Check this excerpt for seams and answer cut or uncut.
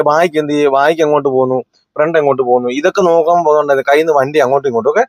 uncut